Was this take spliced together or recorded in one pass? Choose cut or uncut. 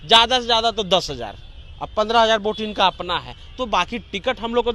uncut